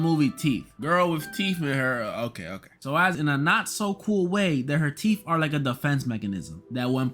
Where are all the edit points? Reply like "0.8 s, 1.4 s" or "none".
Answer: 3.1 s